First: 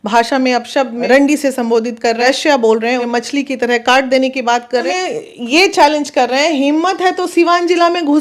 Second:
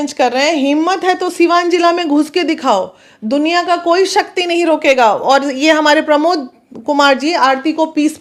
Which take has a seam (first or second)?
first